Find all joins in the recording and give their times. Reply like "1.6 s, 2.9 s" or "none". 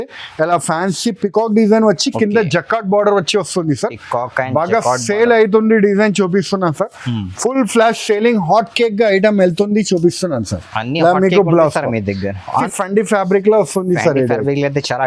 12.6 s